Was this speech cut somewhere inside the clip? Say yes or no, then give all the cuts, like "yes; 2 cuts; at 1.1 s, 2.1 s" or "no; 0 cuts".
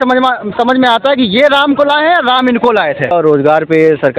yes; 1 cut; at 3.1 s